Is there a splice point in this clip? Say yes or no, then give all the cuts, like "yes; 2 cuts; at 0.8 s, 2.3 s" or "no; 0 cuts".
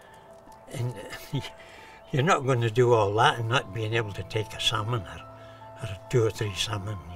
no; 0 cuts